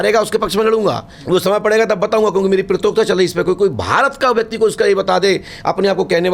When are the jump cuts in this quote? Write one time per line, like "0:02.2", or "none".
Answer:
0:01.1